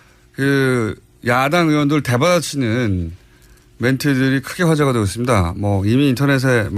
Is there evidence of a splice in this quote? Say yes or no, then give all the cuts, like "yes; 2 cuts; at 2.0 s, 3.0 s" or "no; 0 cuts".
yes; 1 cut; at 4.5 s